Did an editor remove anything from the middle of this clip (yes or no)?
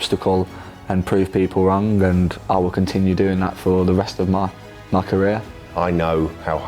no